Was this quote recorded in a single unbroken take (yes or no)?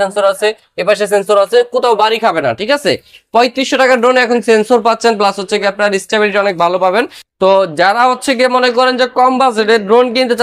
yes